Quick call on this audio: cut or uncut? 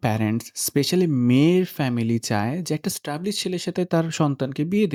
uncut